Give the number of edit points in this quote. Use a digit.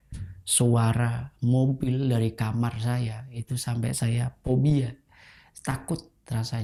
0